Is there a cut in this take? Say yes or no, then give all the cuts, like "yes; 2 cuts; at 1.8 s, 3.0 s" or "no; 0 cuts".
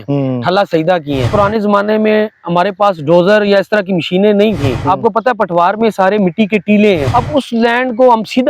yes; 3 cuts; at 1.3 s, 4.8 s, 7.1 s